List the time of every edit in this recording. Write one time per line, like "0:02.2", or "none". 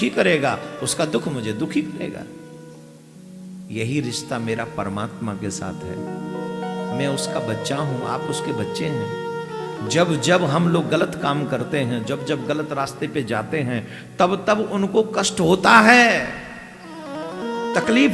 none